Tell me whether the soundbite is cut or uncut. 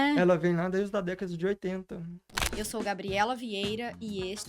cut